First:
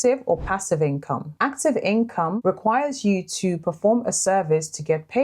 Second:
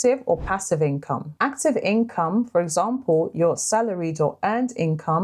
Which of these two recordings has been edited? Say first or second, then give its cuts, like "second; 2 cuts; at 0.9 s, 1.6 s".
first; 1 cut; at 2.4 s